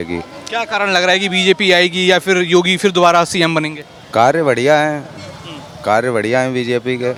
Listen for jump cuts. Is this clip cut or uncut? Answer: uncut